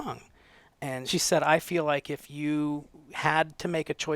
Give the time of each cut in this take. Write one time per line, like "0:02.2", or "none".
0:01.0